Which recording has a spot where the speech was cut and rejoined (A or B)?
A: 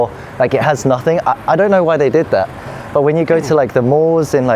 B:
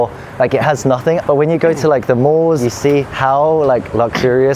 B